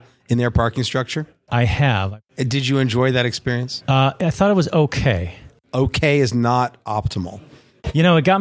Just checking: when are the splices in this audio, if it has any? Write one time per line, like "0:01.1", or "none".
0:01.4
0:02.3
0:03.7
0:05.6